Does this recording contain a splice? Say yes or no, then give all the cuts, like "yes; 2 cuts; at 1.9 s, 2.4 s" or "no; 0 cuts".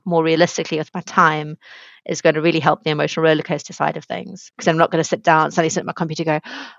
no; 0 cuts